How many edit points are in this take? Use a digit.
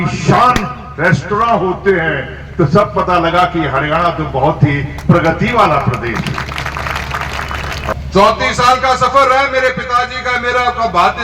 1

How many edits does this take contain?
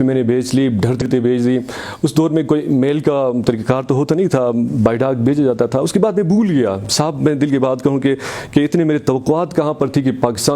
1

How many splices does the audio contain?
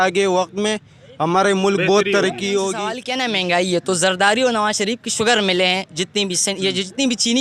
1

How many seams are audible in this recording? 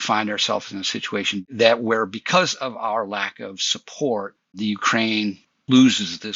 1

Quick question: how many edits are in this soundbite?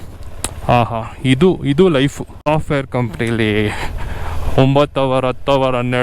1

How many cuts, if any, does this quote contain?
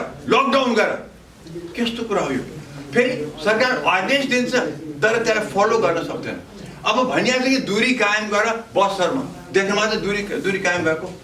0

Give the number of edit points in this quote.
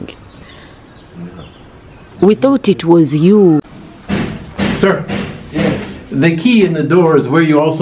1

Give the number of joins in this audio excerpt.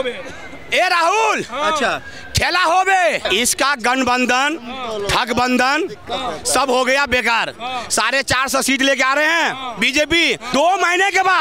2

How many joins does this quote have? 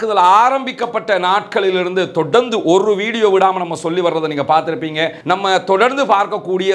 1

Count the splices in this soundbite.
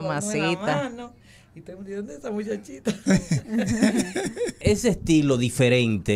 1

